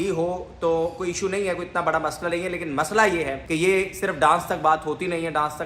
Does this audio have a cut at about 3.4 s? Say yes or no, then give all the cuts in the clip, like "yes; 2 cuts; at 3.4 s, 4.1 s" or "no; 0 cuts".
yes; 1 cut; at 3.4 s